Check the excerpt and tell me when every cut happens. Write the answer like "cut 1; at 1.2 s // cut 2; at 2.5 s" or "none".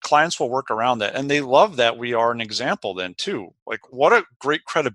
cut 1; at 3.9 s